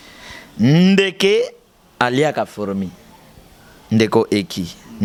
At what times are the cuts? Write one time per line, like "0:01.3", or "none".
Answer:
none